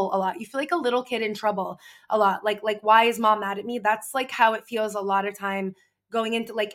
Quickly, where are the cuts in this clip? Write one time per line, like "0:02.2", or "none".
none